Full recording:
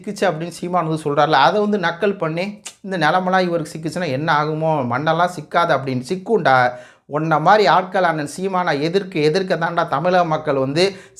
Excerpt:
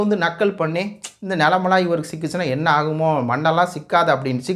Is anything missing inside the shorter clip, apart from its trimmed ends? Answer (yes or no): no